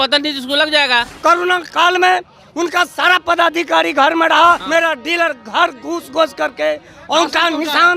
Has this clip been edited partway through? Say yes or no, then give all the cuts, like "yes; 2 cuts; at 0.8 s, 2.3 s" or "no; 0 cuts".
yes; 2 cuts; at 1.1 s, 4.6 s